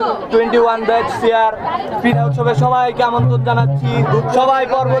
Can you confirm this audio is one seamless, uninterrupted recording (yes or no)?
yes